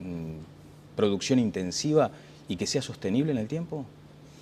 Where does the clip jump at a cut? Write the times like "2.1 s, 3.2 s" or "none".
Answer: 2.9 s